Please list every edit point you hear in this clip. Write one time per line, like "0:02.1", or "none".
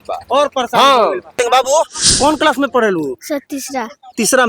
0:01.3